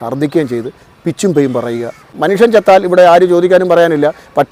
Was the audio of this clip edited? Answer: yes; 1 cut; at 2.1 s

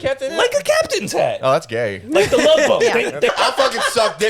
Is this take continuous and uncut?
no; 1 cut; at 3.3 s

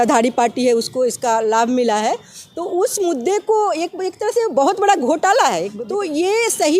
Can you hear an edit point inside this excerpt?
yes; 1 cut; at 5.8 s

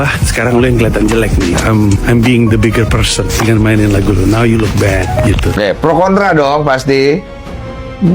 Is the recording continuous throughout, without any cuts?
no; 1 cut; at 5.6 s

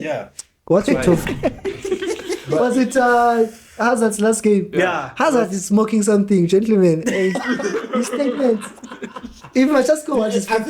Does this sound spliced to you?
yes; 1 cut; at 1.2 s

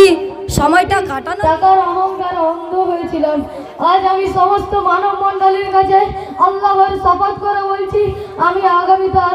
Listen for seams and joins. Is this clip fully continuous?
no; 1 cut; at 1.1 s

